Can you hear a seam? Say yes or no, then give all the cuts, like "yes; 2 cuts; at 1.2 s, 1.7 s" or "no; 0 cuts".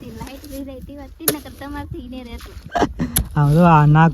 no; 0 cuts